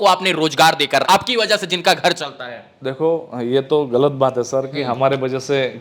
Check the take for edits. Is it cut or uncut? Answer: cut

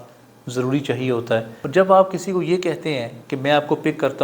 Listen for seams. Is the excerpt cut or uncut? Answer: cut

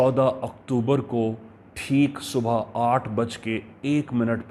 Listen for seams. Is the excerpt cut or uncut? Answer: uncut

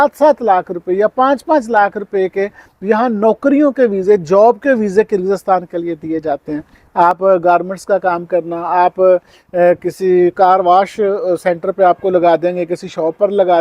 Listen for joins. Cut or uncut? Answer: uncut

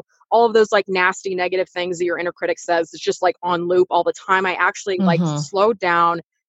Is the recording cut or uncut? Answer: uncut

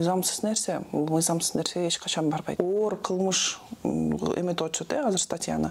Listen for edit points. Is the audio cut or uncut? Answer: cut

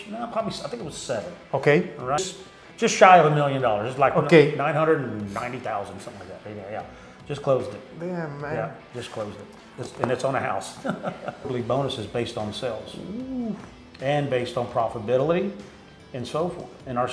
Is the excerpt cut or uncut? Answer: cut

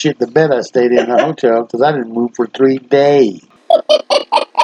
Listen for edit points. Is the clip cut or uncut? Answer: cut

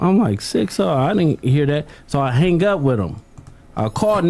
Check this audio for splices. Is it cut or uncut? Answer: cut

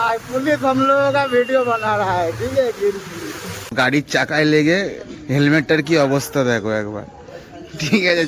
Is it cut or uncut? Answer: cut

